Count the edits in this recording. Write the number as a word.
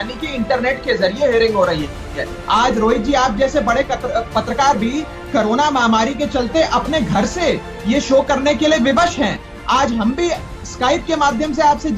zero